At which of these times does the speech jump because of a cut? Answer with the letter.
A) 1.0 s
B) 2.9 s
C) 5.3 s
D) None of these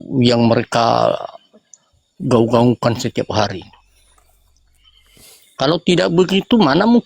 D